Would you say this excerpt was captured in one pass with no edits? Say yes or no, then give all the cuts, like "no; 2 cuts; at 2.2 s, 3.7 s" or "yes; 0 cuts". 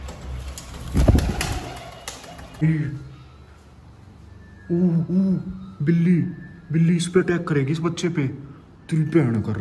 no; 1 cut; at 2.6 s